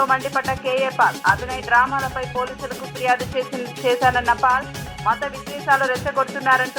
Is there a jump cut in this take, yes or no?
no